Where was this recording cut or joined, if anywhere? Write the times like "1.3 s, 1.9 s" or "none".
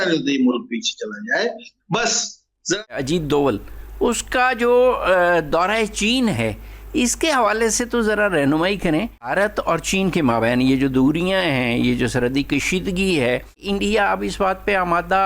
2.9 s, 9.3 s, 13.6 s